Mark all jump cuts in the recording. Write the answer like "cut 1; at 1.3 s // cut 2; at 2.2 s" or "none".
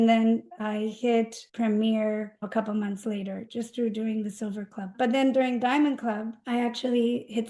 cut 1; at 0.9 s // cut 2; at 2.4 s // cut 3; at 3.5 s // cut 4; at 4.9 s // cut 5; at 6.4 s

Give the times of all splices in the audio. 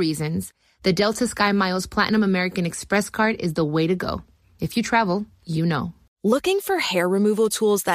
cut 1; at 6.0 s

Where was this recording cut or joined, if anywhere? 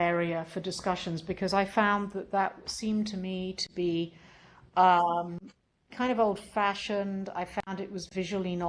none

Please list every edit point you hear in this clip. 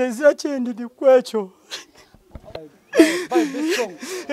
cut 1; at 2.6 s

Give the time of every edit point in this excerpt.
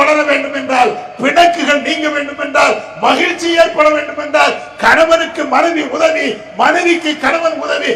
none

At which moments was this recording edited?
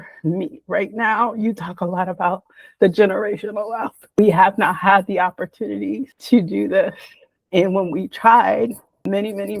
cut 1; at 4.2 s

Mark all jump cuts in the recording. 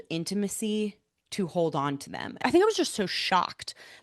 cut 1; at 2.4 s

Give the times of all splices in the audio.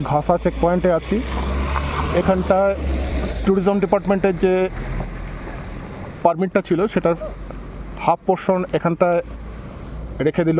none

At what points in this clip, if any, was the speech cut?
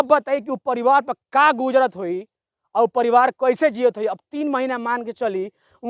none

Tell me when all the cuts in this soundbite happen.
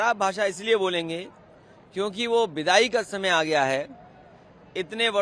none

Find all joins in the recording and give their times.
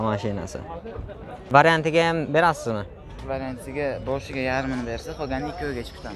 cut 1; at 1.3 s

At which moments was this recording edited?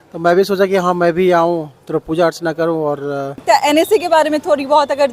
cut 1; at 3.4 s

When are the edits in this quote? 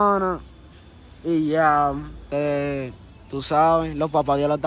none

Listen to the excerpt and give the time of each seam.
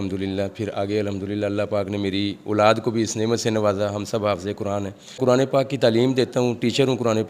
cut 1; at 5.2 s

